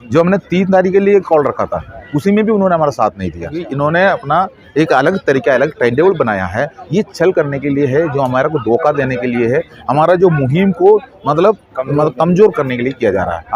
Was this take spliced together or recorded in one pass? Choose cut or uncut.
cut